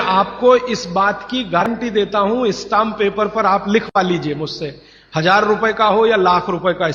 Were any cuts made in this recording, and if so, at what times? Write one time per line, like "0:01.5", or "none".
0:01.6